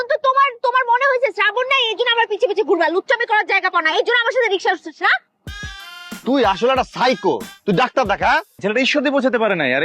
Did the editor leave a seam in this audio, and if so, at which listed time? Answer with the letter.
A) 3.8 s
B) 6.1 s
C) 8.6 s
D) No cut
C